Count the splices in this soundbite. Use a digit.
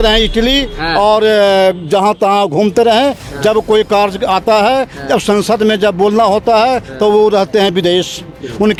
0